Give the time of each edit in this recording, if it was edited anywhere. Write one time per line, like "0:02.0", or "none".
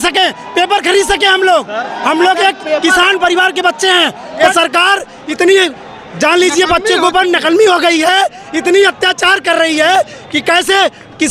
0:04.3